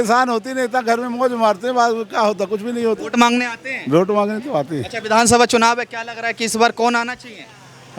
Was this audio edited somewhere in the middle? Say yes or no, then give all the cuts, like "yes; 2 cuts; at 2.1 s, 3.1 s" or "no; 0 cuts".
no; 0 cuts